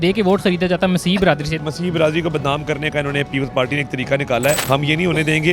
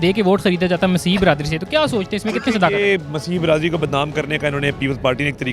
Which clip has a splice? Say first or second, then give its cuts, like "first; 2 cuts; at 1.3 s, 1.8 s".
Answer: first; 2 cuts; at 1.6 s, 4.6 s